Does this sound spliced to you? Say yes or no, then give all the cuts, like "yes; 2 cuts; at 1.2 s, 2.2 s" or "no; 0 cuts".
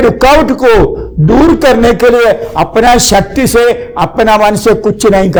no; 0 cuts